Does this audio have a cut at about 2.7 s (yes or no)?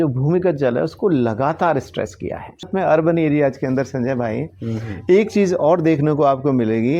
yes